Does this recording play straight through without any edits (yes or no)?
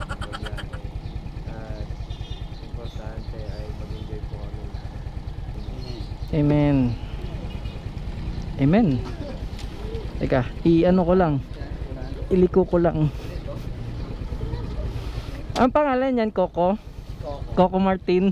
yes